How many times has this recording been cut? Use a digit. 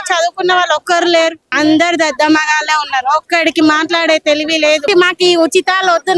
2